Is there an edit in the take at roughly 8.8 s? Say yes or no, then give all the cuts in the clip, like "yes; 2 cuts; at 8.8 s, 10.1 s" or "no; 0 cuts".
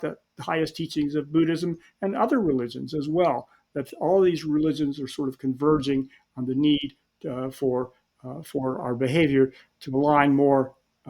yes; 1 cut; at 8.8 s